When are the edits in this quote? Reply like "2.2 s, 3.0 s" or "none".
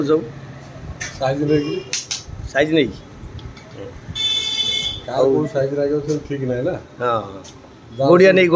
none